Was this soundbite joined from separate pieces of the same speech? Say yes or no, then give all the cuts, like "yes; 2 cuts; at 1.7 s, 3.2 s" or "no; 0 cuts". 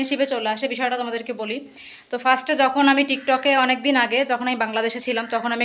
no; 0 cuts